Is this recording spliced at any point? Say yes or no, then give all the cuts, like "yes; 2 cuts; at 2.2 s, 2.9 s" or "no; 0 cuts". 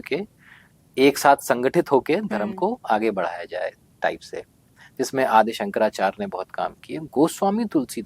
no; 0 cuts